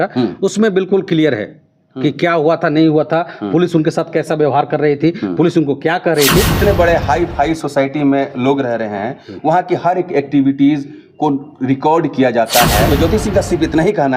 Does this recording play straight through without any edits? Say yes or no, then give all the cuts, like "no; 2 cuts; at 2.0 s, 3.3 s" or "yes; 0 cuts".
no; 2 cuts; at 6.5 s, 12.9 s